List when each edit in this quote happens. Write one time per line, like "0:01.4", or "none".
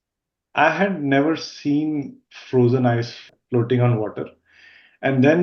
0:03.2